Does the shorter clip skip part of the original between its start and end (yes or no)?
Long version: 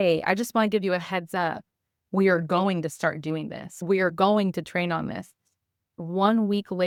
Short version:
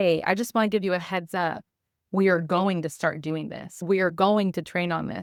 no